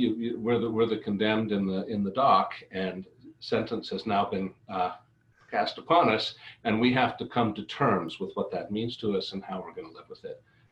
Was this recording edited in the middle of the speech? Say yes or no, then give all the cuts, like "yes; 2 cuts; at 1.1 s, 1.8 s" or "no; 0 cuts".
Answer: no; 0 cuts